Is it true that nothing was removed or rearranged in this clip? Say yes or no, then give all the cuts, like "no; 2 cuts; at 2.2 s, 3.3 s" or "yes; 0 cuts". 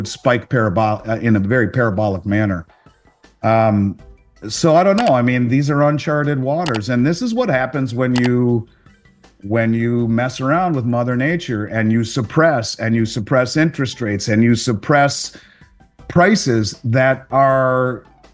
yes; 0 cuts